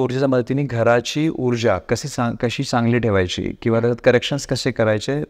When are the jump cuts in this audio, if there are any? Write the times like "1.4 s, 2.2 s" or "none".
none

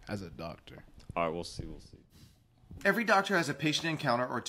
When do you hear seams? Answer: none

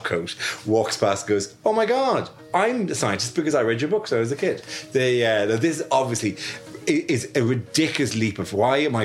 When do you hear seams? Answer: none

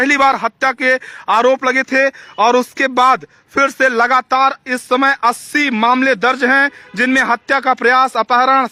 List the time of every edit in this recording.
none

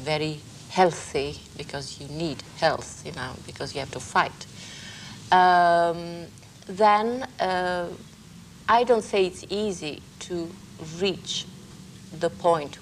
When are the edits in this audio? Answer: none

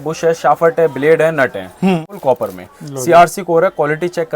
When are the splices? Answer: 2.1 s

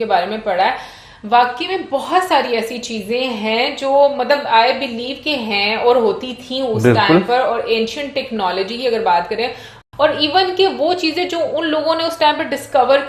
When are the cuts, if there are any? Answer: 9.7 s

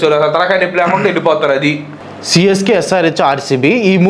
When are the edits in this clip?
1.9 s

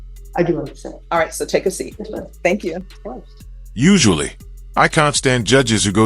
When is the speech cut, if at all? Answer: none

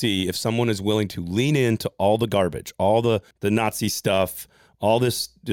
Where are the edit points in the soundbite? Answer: 3.3 s

